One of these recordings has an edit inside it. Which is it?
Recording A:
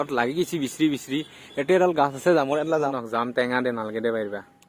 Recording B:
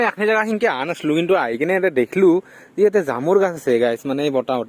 A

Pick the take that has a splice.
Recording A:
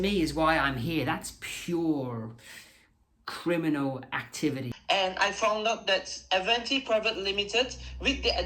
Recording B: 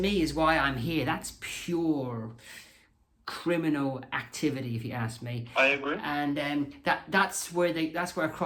A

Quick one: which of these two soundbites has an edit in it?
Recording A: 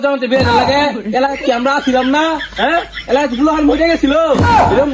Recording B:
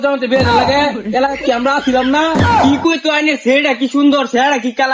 B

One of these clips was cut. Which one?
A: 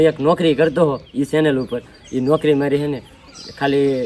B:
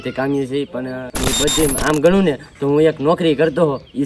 B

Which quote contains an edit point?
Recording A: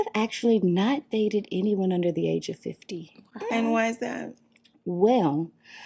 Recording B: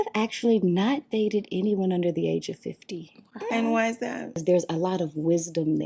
B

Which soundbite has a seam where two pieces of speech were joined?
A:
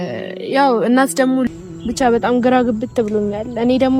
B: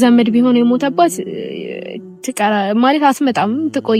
A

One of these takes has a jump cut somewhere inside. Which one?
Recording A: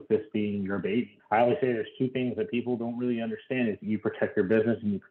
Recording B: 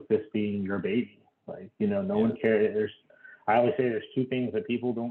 A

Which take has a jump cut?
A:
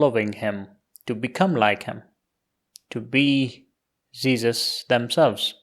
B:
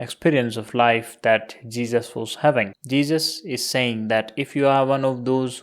B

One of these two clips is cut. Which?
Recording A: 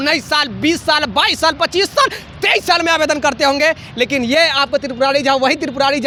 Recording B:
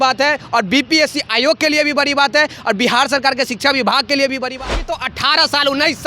B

